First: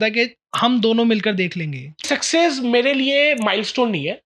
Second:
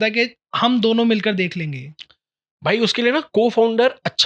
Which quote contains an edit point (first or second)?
first